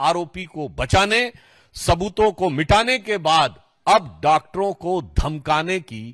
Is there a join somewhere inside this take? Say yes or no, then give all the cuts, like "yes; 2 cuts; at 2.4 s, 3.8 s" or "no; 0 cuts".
no; 0 cuts